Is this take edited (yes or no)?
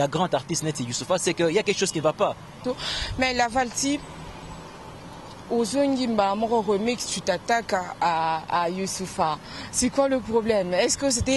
yes